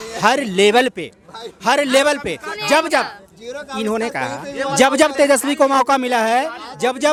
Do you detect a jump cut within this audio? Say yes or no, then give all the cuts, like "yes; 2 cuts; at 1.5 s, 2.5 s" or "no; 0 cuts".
no; 0 cuts